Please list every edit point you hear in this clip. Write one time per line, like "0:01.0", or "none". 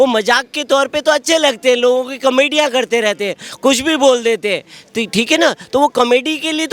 none